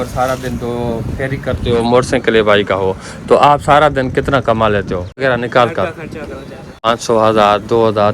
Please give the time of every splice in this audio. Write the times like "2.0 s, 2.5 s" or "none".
5.2 s, 6.9 s